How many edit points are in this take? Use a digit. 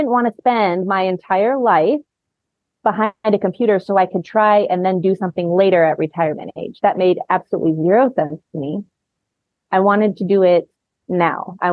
1